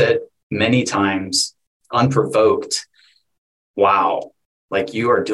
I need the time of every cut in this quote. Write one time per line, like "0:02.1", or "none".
none